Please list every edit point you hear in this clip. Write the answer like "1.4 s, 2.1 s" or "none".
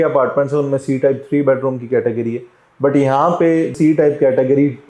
3.8 s